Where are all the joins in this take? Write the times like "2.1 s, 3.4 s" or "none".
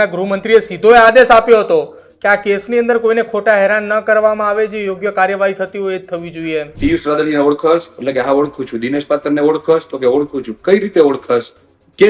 6.7 s